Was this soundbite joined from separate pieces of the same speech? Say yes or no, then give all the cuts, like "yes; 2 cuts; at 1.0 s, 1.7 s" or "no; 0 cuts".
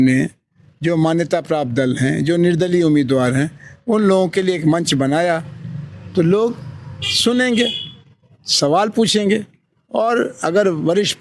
no; 0 cuts